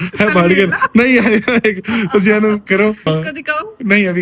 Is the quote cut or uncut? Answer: uncut